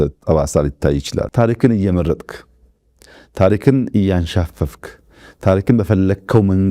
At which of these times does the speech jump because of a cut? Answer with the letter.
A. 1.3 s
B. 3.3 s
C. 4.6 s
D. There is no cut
A